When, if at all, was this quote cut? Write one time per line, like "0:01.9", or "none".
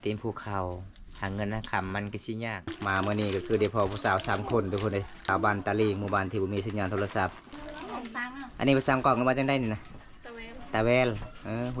0:02.7
0:05.2
0:07.5